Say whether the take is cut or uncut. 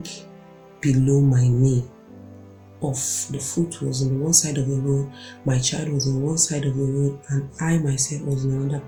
uncut